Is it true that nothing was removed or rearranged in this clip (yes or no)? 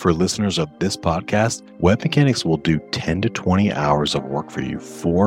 no